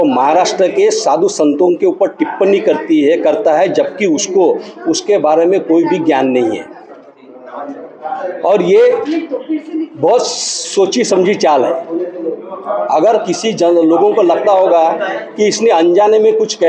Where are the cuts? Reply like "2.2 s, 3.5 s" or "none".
none